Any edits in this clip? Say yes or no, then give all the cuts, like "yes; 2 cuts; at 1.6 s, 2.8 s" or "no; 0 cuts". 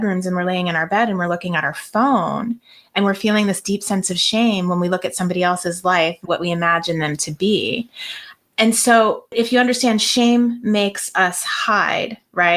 yes; 1 cut; at 9.3 s